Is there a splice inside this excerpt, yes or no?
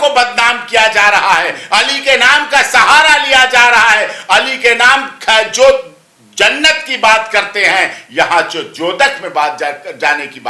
no